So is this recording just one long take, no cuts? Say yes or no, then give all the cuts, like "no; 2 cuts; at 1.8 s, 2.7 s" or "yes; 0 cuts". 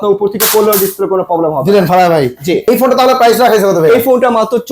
no; 1 cut; at 2.6 s